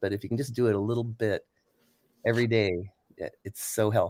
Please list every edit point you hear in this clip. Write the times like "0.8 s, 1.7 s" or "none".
none